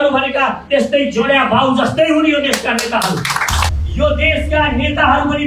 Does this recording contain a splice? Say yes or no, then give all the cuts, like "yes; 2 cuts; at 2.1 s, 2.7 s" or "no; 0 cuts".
yes; 1 cut; at 3.8 s